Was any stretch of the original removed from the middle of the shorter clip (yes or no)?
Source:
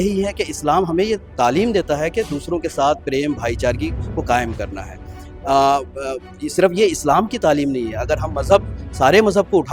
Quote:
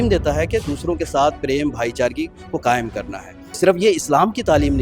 yes